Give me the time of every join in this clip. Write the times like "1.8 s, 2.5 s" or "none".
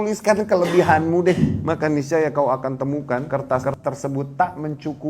1.6 s, 3.2 s